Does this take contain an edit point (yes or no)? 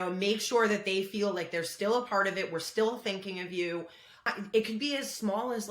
yes